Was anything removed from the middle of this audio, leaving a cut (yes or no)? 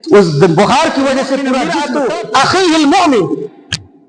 yes